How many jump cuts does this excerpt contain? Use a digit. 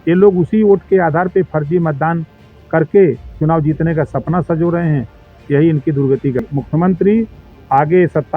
1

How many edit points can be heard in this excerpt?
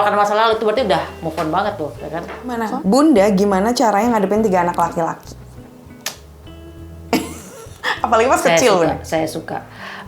1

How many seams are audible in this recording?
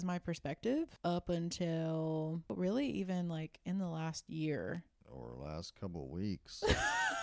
2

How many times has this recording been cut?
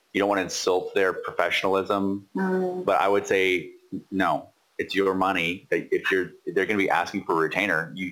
0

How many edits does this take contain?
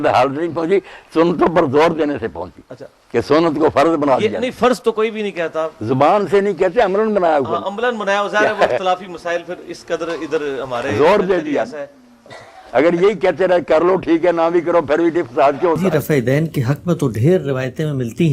1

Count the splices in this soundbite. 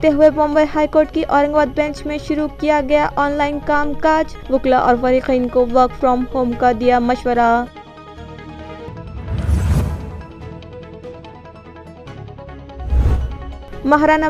0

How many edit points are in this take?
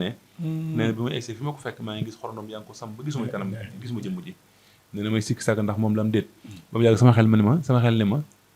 0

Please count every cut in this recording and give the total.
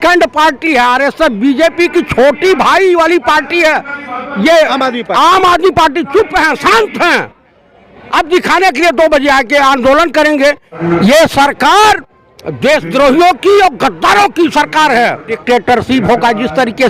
2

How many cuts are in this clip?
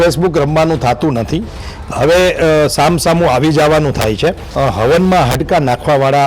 1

